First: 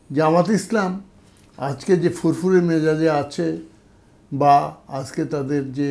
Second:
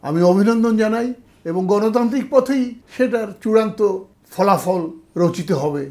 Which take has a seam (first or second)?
second